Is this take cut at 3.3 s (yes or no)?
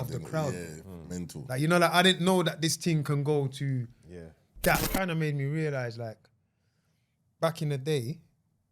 no